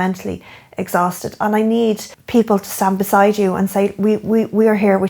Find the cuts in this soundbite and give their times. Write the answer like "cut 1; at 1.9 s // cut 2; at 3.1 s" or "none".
cut 1; at 2.1 s